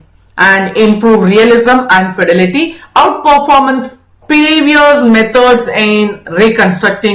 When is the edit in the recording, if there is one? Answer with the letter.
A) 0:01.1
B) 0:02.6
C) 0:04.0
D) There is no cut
D